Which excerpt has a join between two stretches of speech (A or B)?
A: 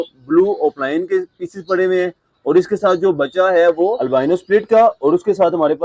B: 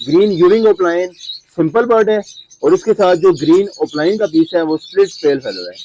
A